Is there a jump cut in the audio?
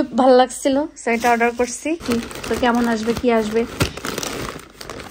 yes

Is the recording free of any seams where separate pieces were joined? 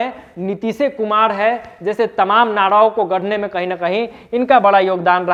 yes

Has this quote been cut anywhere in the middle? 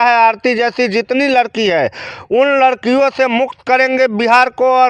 no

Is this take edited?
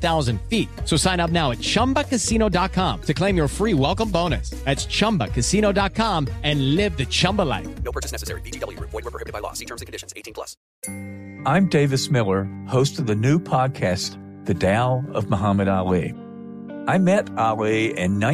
yes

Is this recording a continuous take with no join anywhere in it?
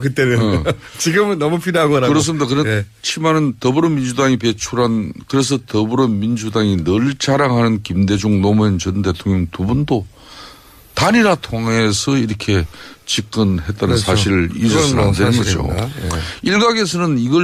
yes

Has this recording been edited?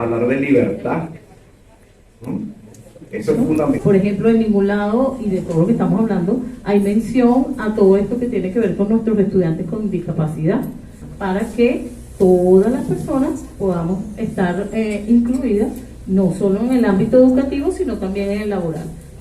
yes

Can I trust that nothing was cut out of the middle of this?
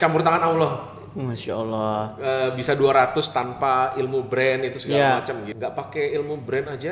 no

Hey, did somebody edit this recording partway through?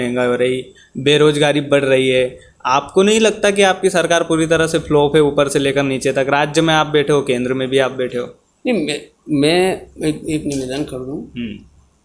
no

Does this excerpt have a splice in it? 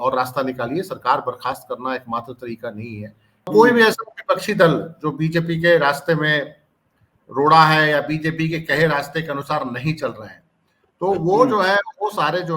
yes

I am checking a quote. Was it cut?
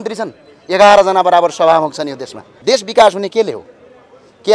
yes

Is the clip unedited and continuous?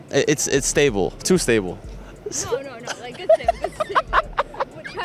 yes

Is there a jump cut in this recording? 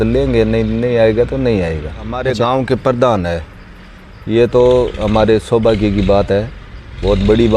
yes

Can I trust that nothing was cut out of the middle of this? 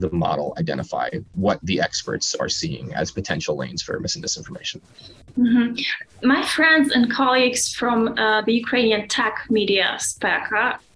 yes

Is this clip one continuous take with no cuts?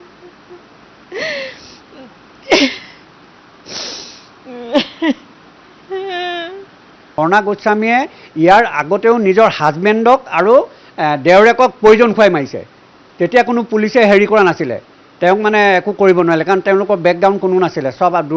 no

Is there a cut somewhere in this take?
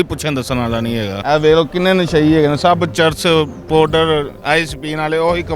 yes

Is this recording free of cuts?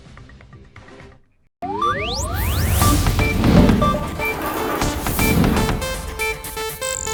yes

